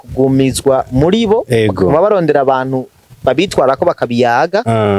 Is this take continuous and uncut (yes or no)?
yes